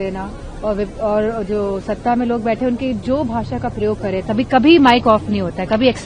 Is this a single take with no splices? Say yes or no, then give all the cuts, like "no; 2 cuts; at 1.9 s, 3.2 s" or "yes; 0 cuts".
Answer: yes; 0 cuts